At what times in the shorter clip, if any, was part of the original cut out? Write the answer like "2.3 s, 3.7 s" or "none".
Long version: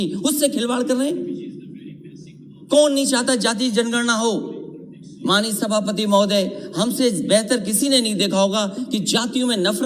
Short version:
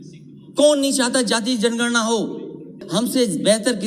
2.8 s